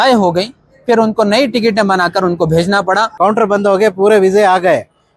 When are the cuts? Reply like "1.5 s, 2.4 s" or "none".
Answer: 3.1 s